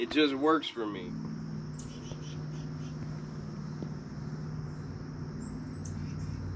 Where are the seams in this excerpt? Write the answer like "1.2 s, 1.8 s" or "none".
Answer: 1.0 s